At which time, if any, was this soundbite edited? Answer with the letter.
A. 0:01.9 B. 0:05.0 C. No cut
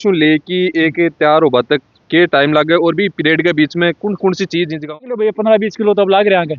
B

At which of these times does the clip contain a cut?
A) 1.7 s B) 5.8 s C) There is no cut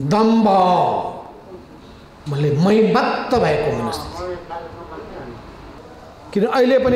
B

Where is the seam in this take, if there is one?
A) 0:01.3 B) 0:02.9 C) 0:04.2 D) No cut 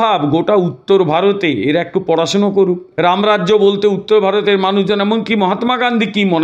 B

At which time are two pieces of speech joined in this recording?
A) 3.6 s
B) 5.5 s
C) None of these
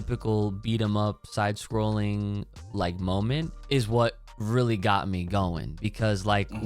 A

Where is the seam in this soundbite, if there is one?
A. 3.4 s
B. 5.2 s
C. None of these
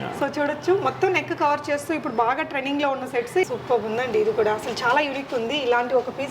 A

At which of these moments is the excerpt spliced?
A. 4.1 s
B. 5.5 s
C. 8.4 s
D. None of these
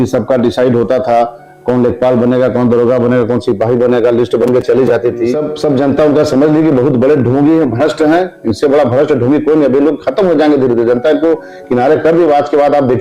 B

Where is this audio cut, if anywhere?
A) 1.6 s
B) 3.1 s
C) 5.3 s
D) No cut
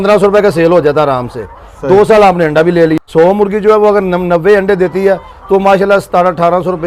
B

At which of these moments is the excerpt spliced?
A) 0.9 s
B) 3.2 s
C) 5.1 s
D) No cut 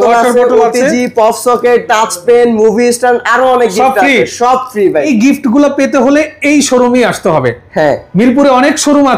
C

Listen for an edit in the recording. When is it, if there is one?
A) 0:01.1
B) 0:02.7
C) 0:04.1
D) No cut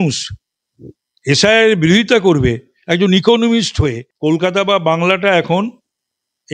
C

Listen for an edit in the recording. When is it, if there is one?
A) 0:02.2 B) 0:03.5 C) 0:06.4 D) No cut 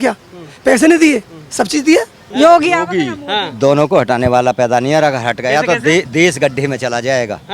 A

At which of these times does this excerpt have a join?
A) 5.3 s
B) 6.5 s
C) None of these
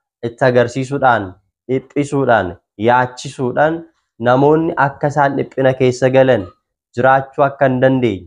C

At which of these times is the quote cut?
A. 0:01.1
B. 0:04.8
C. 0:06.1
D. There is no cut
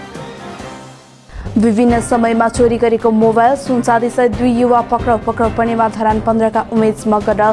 D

